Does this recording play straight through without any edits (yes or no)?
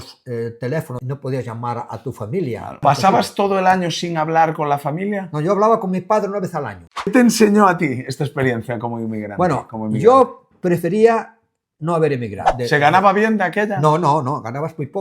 no